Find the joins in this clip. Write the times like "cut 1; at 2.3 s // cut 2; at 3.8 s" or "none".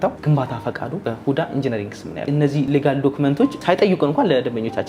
cut 1; at 1.0 s // cut 2; at 2.5 s // cut 3; at 3.6 s